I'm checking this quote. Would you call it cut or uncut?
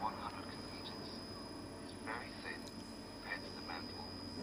uncut